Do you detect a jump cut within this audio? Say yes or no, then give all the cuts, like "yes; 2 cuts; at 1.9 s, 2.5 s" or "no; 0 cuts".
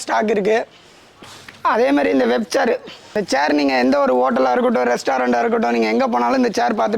no; 0 cuts